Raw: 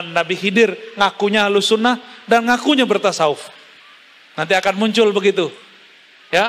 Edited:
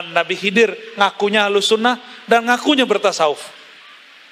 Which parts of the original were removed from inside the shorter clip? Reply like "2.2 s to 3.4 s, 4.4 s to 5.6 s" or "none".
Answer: none